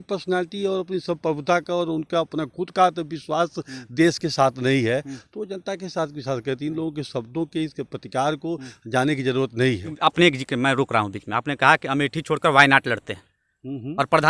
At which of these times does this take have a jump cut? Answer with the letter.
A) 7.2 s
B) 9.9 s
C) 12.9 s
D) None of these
B